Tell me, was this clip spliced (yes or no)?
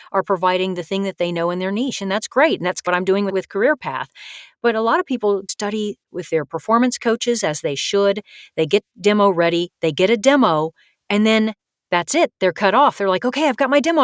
no